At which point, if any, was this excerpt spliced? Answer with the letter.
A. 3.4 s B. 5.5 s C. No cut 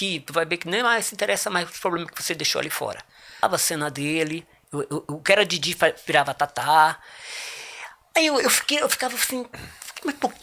A